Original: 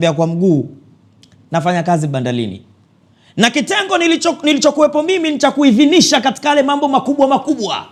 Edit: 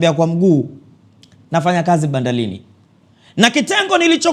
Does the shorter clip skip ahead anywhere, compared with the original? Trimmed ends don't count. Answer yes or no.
no